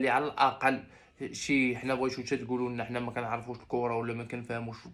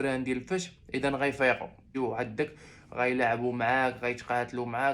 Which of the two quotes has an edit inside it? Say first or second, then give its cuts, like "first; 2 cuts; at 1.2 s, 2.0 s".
second; 1 cut; at 1.9 s